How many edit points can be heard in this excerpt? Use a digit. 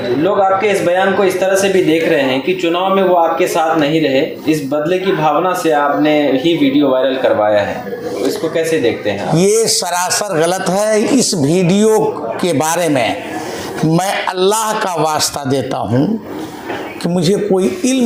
0